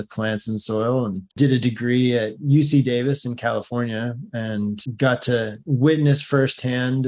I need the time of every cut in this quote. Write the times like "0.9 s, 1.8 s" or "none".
1.2 s